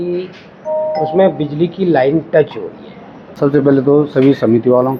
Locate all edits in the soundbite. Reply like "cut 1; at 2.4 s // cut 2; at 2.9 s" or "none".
cut 1; at 3.3 s

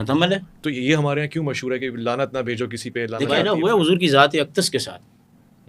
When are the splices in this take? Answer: cut 1; at 3.4 s

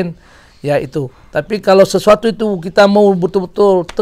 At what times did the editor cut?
none

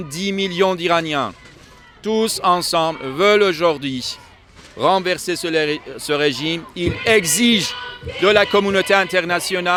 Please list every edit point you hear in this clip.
none

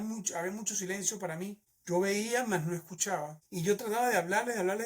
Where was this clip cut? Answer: cut 1; at 1.7 s

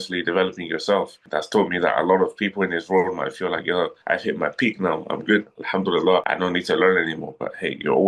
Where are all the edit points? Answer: cut 1; at 6.3 s

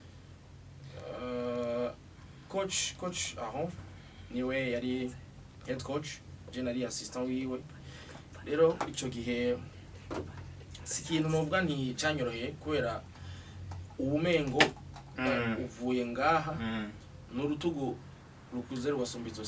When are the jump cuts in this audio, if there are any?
none

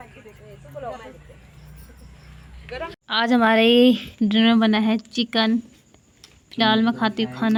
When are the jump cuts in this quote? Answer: none

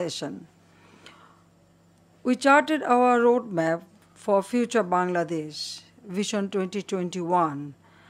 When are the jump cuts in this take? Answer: cut 1; at 6.4 s

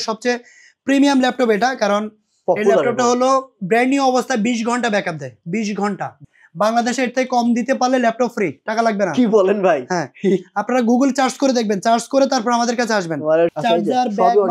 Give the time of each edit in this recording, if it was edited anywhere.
cut 1; at 6.3 s // cut 2; at 13.5 s

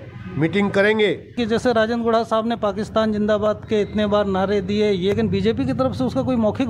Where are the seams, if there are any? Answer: cut 1; at 1.4 s // cut 2; at 5.1 s

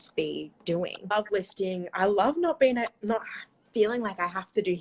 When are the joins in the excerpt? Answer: cut 1; at 1.0 s

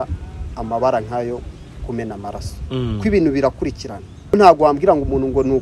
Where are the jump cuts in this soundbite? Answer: cut 1; at 4.3 s

